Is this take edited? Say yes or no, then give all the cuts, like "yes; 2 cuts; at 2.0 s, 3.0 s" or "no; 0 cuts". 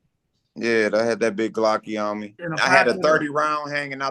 yes; 1 cut; at 2.4 s